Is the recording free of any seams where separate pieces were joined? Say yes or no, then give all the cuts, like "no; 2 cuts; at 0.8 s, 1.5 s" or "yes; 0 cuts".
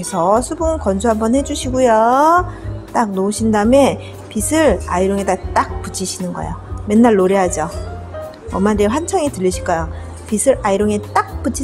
yes; 0 cuts